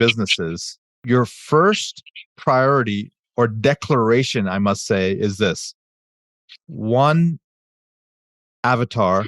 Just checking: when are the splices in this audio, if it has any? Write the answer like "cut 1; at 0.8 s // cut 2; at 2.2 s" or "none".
cut 1; at 1.0 s